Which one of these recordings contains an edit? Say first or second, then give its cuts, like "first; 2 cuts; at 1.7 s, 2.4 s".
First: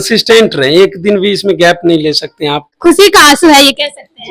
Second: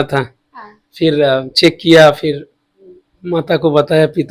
first; 1 cut; at 2.7 s